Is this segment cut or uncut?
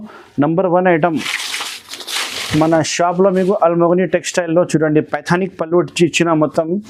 uncut